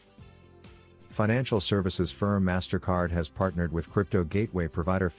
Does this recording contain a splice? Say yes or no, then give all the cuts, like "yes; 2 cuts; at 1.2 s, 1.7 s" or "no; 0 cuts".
no; 0 cuts